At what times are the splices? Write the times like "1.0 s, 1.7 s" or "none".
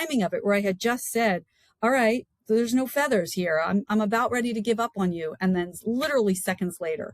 none